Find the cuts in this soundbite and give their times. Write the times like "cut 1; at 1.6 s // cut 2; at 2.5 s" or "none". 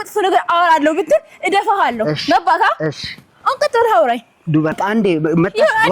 cut 1; at 4.7 s